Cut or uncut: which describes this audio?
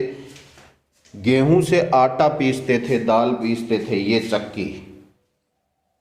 uncut